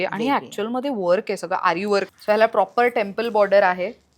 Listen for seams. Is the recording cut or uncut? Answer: cut